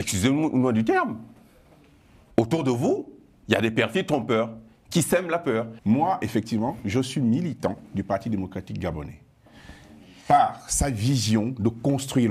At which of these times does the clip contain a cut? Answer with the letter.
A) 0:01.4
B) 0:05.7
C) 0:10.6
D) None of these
B